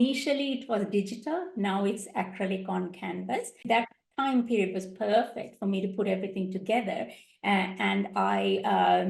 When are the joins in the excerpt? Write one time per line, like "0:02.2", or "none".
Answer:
0:03.6

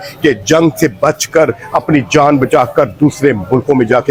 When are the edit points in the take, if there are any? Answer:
none

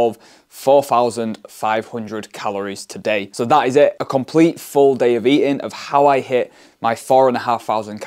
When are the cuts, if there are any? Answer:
none

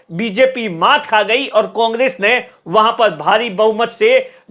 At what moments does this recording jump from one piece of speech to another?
none

